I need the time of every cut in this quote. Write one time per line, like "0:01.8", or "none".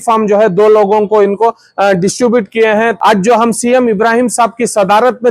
0:03.0